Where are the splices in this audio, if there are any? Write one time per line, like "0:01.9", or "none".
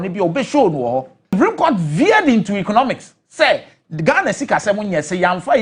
0:01.3